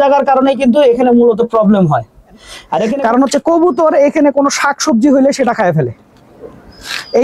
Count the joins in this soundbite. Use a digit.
1